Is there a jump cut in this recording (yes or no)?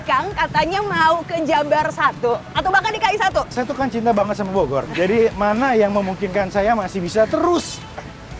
yes